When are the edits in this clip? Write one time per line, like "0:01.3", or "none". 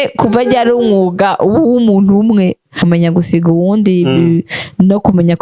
0:02.8